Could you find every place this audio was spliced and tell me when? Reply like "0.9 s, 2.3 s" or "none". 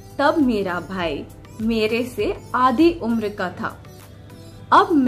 none